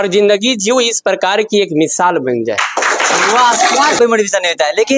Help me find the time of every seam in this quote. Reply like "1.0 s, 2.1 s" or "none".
4.0 s